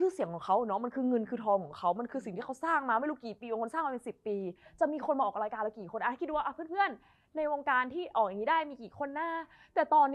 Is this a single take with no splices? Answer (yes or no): yes